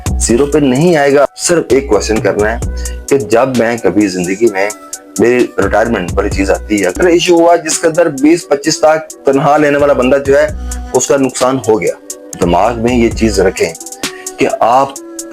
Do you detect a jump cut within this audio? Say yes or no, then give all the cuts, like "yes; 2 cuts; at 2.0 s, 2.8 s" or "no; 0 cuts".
yes; 3 cuts; at 1.2 s, 7.0 s, 12.2 s